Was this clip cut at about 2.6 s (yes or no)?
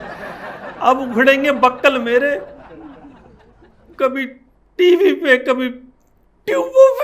yes